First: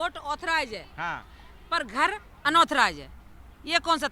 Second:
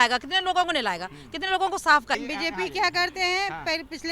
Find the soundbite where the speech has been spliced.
second; 1 cut; at 2.2 s

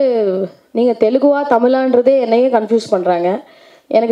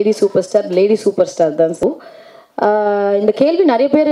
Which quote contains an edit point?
second; 1 cut; at 1.8 s

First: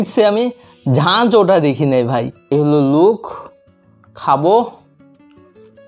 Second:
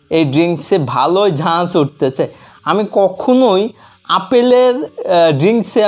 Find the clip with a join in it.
first; 2 cuts; at 2.5 s, 4.9 s

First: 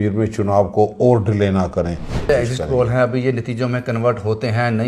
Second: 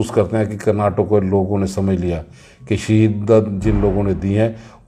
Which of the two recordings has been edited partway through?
first; 1 cut; at 2.3 s

